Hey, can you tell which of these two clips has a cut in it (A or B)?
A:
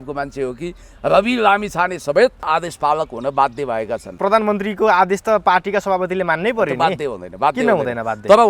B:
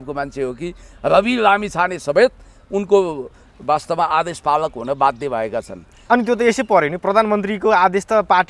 A